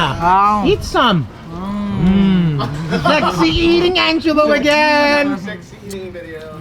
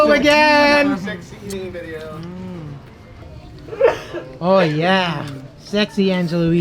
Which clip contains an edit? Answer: second; 1 cut; at 3.2 s

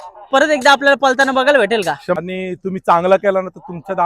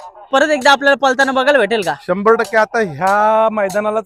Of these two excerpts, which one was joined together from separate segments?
first; 1 cut; at 2.2 s

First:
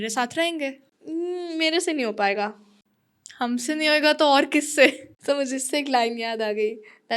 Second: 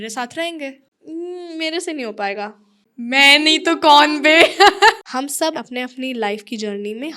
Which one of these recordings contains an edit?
second; 2 cuts; at 2.8 s, 5.2 s

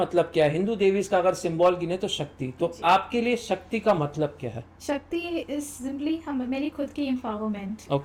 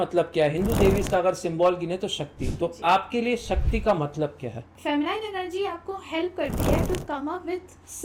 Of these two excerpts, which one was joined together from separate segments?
second; 1 cut; at 4.7 s

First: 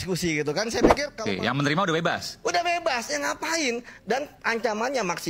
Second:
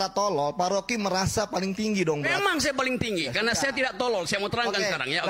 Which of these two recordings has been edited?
first; 1 cut; at 1.1 s

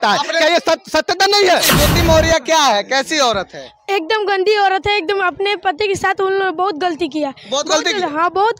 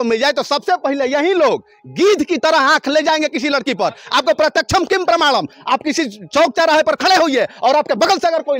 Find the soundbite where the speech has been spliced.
first; 1 cut; at 1.7 s

